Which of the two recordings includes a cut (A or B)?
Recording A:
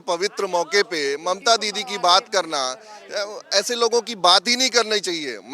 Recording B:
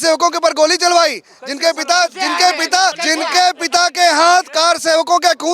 B